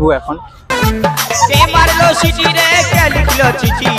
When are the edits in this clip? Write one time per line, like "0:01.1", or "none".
none